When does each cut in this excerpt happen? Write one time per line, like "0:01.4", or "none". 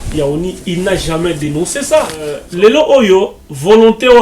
0:02.4